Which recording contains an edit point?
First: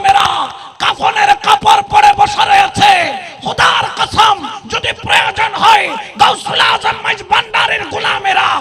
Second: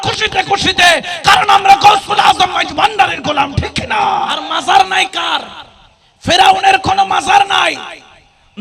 second; 1 cut; at 4.4 s

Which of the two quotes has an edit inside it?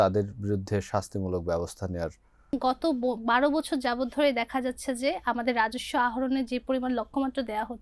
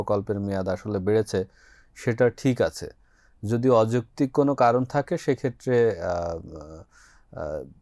first; 1 cut; at 2.5 s

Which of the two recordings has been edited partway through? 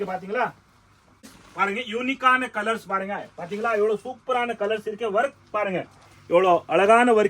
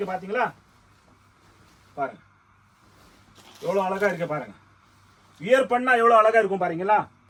first; 1 cut; at 1.4 s

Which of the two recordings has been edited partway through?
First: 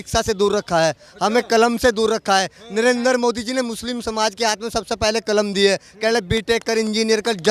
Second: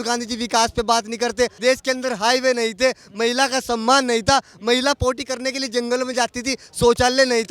second; 1 cut; at 1.6 s

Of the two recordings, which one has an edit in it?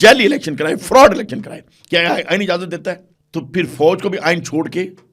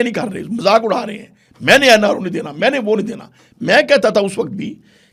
first; 1 cut; at 3.1 s

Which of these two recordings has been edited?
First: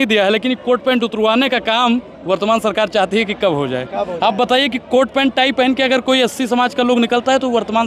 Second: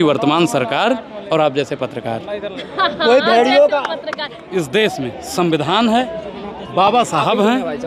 second; 1 cut; at 4.3 s

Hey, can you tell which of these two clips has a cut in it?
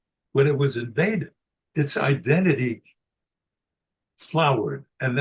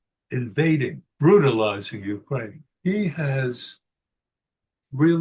second; 2 cuts; at 1.0 s, 2.6 s

